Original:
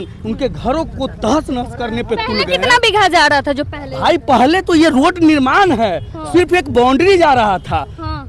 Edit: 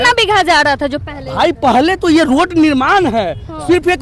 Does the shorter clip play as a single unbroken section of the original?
yes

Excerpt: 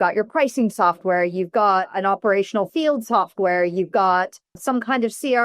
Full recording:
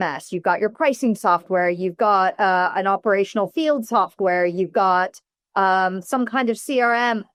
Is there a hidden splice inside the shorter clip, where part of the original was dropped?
yes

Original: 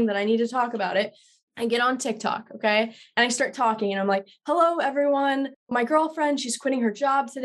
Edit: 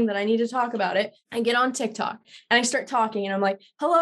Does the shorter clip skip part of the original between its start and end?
yes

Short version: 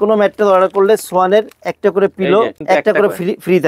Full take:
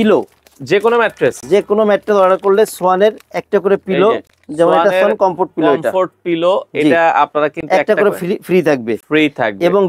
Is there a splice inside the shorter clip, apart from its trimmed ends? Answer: yes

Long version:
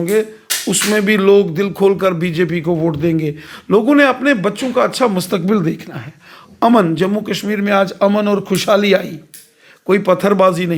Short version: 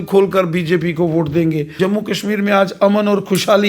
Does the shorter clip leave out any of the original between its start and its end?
yes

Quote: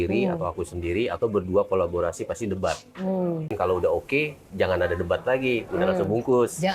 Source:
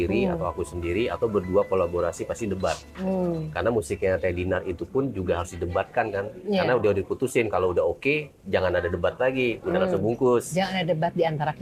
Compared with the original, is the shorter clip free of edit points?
no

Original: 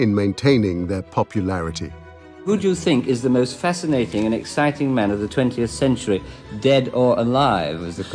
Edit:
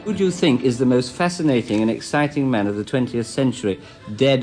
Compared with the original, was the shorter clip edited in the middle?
no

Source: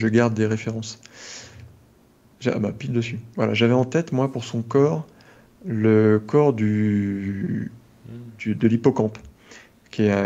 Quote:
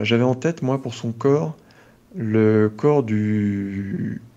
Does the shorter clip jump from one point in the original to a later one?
no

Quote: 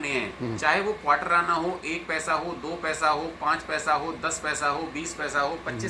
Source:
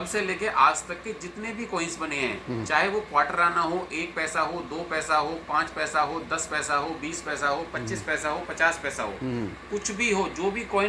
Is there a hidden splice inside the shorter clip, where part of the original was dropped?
no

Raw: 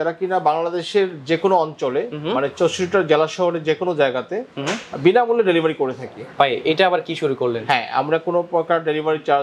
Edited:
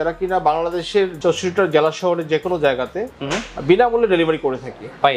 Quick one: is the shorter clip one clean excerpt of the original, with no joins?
no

